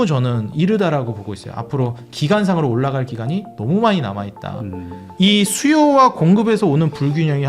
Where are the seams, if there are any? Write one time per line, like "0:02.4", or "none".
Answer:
0:05.0